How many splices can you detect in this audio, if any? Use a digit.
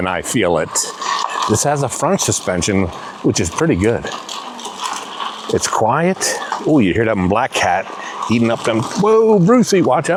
0